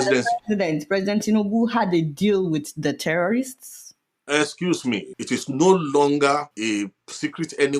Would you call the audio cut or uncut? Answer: cut